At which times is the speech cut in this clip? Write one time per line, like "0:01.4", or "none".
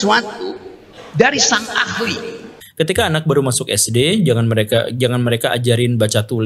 0:02.6

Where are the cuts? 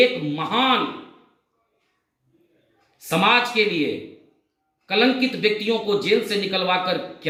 none

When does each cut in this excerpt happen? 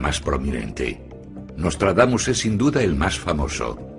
0:02.8

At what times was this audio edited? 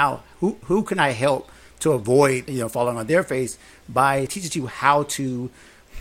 0:02.5
0:04.3

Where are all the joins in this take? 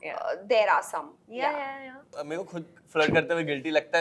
0:02.3

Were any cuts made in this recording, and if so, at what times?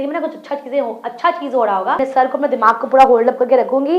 0:02.0

